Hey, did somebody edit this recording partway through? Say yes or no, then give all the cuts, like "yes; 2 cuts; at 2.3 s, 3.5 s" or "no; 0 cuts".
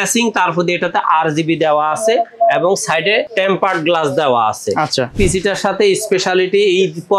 yes; 2 cuts; at 3.3 s, 5.2 s